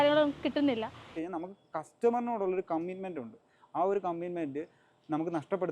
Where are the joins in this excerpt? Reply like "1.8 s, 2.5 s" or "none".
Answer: 1.2 s